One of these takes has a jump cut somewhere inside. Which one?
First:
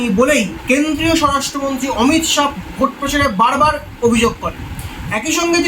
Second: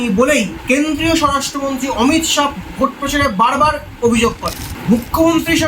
second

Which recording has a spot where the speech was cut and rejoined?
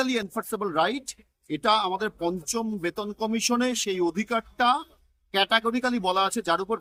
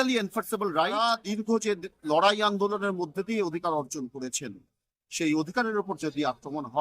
second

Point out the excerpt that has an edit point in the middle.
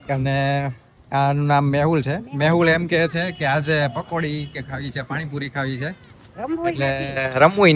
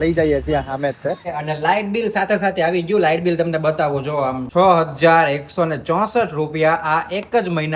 second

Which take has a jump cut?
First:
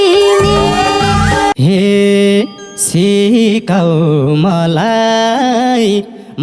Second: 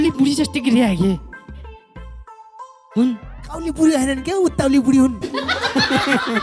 first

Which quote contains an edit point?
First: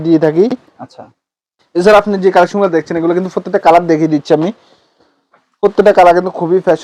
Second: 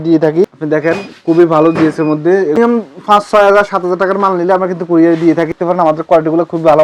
second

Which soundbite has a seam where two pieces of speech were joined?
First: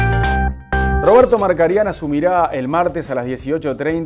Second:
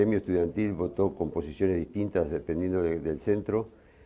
first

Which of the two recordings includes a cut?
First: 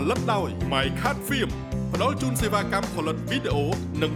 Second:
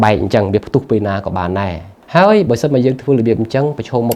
second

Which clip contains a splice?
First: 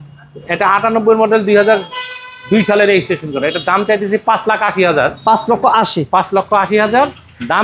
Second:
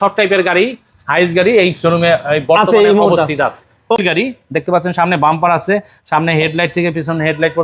second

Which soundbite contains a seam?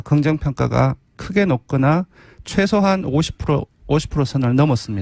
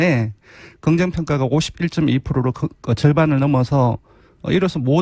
first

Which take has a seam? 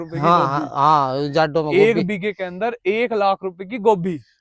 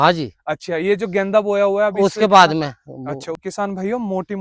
second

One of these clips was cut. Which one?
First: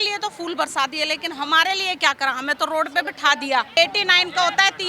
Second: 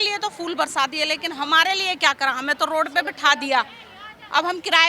first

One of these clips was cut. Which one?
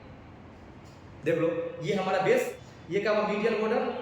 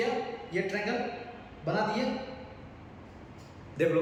first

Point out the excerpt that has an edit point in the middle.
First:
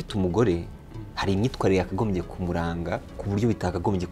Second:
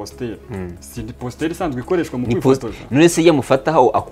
first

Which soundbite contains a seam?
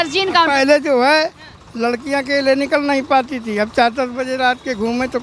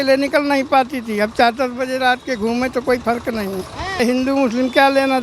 second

